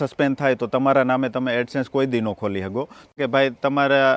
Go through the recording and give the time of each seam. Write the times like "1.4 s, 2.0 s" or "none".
3.1 s